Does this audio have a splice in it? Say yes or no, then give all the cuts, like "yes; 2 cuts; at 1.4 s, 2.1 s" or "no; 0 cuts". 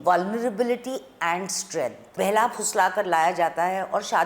yes; 1 cut; at 2.1 s